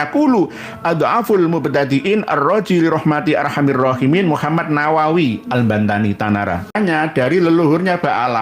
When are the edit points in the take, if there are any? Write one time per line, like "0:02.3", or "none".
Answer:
0:06.7